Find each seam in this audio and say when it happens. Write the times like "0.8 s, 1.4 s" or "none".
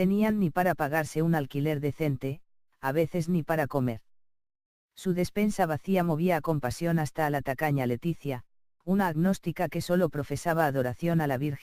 3.7 s